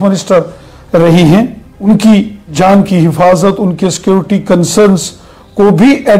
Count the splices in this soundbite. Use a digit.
2